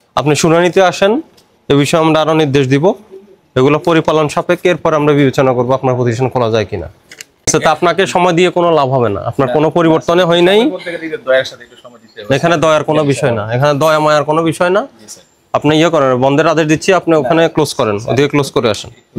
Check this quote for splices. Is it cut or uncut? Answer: cut